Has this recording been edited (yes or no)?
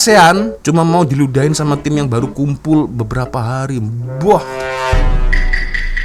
no